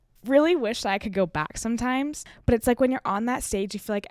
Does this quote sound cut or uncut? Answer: cut